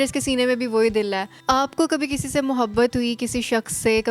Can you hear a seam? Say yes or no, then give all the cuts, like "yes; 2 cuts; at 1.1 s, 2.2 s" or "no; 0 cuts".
yes; 1 cut; at 1.3 s